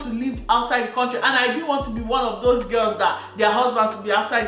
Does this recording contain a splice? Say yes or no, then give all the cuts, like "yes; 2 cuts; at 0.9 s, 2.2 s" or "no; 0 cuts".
no; 0 cuts